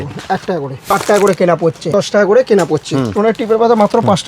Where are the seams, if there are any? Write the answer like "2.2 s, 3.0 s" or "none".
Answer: 0.9 s, 1.9 s, 3.1 s